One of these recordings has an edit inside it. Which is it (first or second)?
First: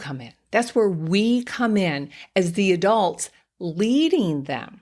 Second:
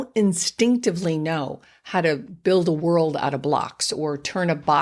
second